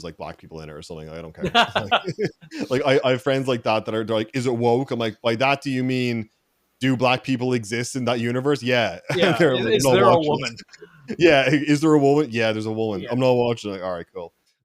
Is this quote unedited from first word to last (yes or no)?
yes